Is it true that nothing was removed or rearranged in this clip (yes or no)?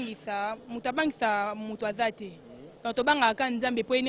yes